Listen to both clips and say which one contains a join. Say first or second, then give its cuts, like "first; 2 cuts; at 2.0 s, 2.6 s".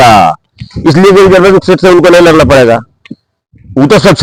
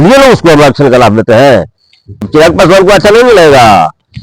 second; 1 cut; at 2.2 s